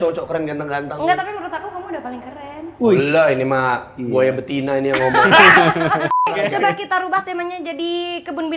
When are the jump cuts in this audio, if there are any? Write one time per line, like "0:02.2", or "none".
0:06.5